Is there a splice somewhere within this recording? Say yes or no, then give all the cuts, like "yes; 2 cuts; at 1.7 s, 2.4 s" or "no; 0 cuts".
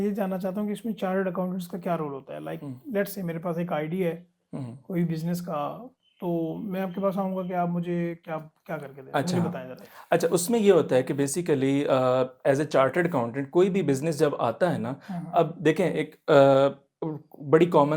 no; 0 cuts